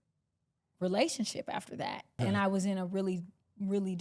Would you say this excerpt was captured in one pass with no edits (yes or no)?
no